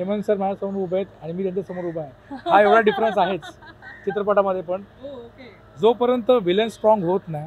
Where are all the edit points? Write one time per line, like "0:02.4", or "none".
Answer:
none